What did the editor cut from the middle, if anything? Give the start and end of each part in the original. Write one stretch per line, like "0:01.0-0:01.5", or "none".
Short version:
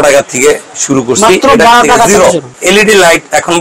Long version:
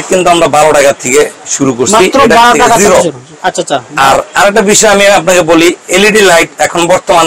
0:03.3-0:05.8